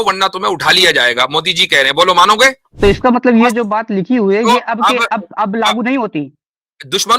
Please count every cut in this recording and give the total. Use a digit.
1